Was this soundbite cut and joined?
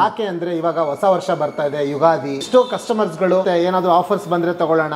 yes; 2 cuts; at 2.5 s, 3.4 s

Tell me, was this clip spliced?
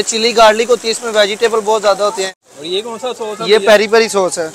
yes; 1 cut; at 2.3 s

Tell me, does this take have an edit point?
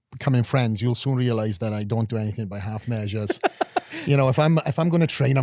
no; 0 cuts

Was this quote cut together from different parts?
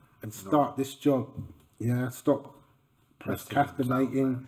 no; 0 cuts

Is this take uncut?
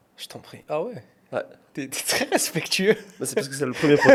yes; 0 cuts

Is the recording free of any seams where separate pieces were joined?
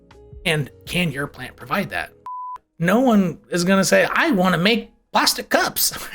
no; 1 cut; at 2.7 s

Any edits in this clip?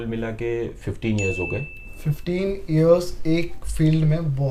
no; 0 cuts

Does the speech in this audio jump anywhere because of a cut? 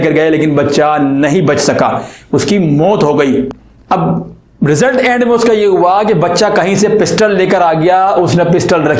yes; 1 cut; at 3.7 s

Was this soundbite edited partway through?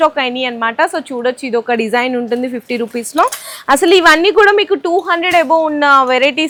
no; 0 cuts

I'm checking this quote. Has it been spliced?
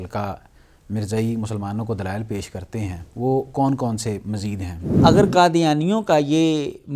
yes; 2 cuts; at 3.0 s, 5.0 s

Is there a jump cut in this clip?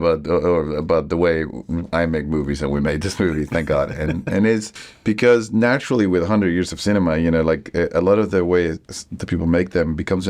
no; 0 cuts

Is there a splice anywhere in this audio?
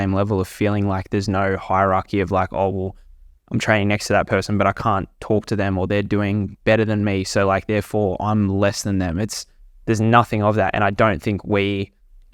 no; 0 cuts

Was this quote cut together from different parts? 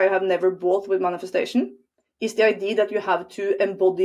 no; 0 cuts

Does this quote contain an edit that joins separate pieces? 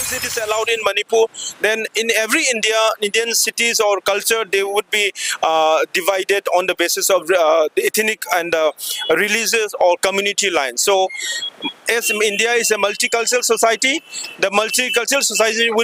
no; 0 cuts

